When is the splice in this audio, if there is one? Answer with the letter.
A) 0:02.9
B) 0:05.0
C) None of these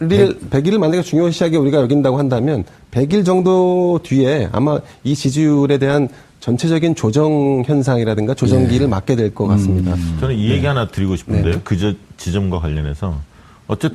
B